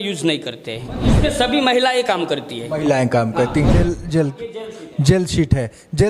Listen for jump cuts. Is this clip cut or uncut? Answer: cut